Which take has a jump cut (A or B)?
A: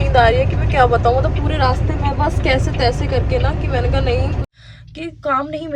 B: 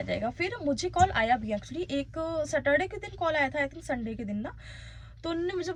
A